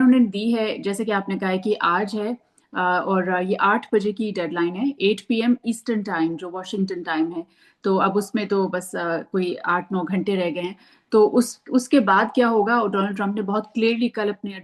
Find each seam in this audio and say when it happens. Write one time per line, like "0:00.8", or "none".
none